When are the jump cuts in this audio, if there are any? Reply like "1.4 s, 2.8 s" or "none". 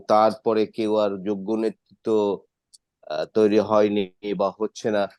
none